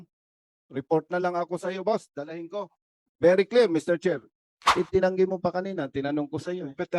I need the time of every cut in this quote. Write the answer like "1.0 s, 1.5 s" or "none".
4.7 s